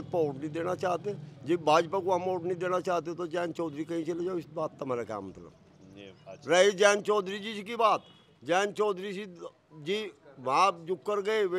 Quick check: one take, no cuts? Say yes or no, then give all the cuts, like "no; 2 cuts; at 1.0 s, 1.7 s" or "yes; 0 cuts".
yes; 0 cuts